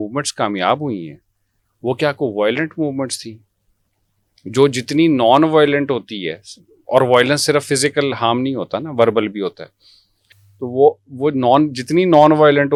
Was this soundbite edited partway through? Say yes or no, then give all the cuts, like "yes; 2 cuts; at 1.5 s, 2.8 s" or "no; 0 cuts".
no; 0 cuts